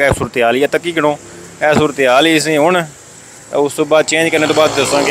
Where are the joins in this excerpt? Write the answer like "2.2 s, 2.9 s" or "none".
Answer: none

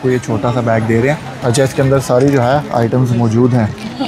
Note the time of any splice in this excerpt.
1.3 s

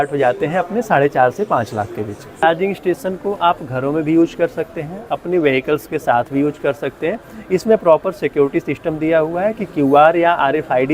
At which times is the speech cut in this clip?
2.4 s

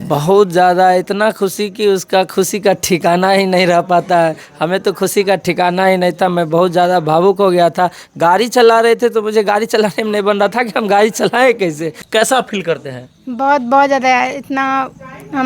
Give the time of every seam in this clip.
12.0 s

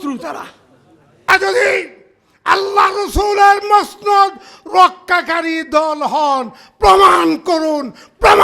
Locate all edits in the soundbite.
1.3 s

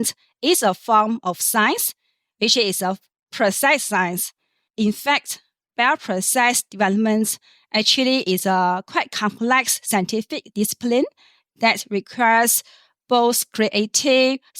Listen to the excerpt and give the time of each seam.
4.7 s

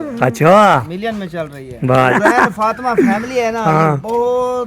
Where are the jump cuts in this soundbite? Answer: 2.1 s

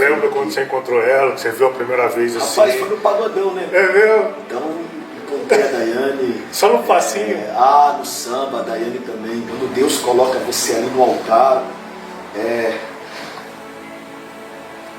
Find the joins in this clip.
9.5 s

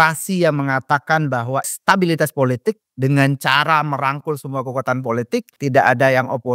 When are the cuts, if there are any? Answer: 1.7 s, 5.5 s

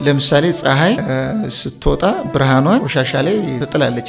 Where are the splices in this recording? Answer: 1.0 s, 3.1 s

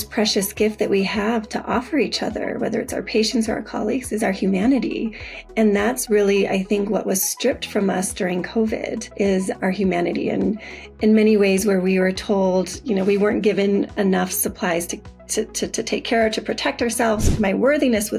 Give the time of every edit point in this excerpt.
9.6 s, 17.3 s

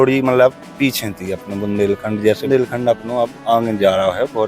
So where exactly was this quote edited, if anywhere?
2.5 s

